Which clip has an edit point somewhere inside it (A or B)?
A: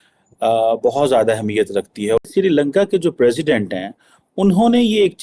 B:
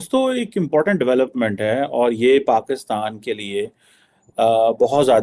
A